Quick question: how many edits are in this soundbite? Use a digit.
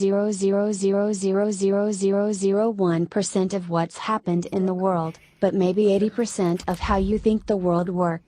1